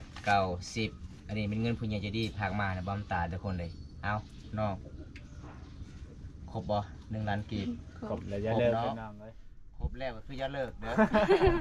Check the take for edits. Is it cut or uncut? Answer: uncut